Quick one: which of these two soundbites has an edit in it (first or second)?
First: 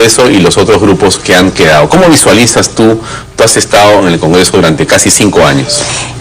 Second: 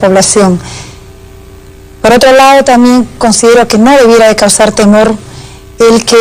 first